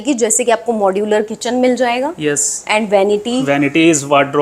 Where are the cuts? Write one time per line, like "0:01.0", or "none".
none